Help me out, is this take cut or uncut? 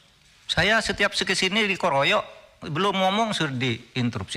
uncut